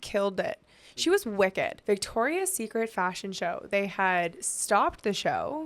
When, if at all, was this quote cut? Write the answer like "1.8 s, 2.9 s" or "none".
1.8 s